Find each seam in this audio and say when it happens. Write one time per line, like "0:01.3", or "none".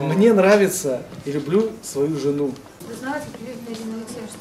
0:02.9